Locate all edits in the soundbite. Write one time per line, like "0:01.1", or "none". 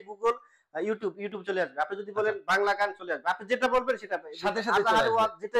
none